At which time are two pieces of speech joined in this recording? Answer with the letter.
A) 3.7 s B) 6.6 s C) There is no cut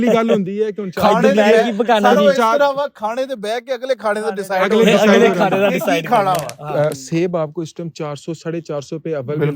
B